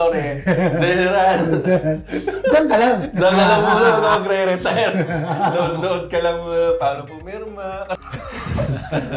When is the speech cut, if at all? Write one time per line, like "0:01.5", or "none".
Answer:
0:08.0